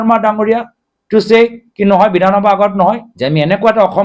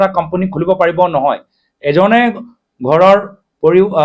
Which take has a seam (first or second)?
first